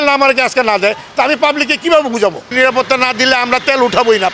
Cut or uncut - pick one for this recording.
cut